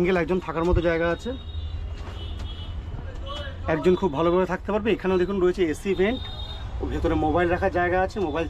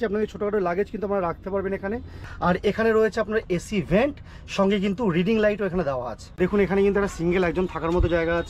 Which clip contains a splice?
second; 2 cuts; at 2.2 s, 6.4 s

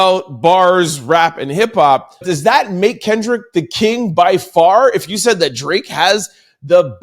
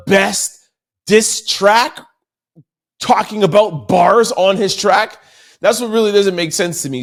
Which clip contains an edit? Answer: first; 1 cut; at 2.3 s

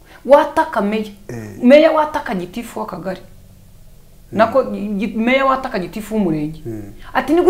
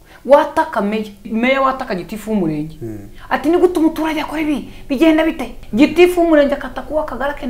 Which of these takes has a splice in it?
second; 2 cuts; at 1.2 s, 5.5 s

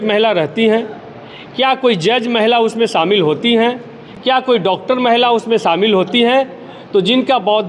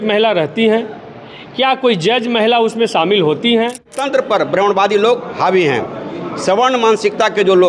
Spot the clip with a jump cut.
second; 1 cut; at 4.0 s

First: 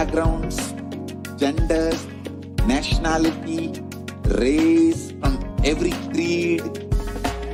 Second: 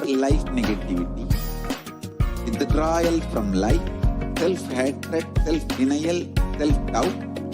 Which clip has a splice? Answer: second; 1 cut; at 1.6 s

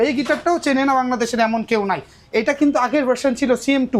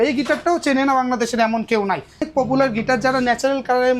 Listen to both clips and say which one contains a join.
second; 1 cut; at 2.3 s

